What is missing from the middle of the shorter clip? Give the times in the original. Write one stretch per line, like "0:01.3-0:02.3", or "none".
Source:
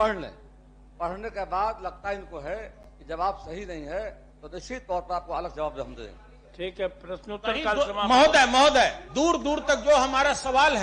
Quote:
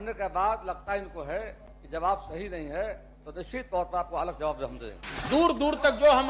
0:06.3-0:09.0